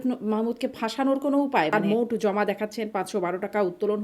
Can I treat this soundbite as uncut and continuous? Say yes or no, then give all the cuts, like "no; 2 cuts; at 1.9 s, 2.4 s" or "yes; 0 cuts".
no; 1 cut; at 1.7 s